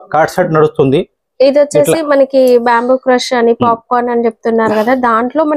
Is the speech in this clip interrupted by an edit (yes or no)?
no